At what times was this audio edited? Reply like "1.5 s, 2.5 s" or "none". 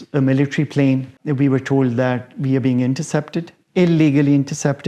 1.2 s

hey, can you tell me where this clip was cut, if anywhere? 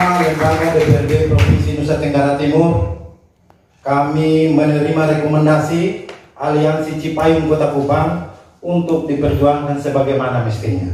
none

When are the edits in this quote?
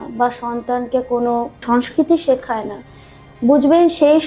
1.6 s

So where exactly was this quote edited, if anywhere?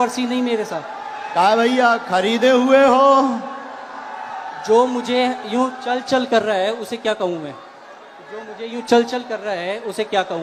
none

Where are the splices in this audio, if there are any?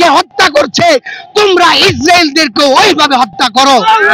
none

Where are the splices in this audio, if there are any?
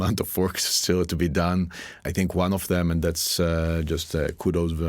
2.0 s

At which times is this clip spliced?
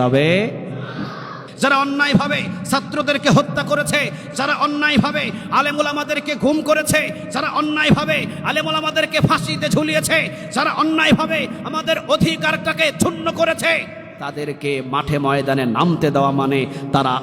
1.4 s

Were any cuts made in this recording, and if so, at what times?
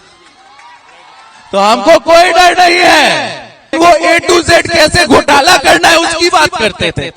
3.8 s

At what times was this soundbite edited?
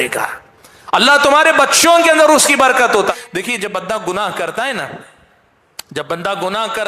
3.1 s

